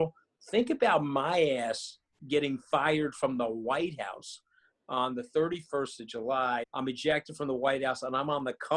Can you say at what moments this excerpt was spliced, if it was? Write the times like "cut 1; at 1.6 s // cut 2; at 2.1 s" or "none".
cut 1; at 6.7 s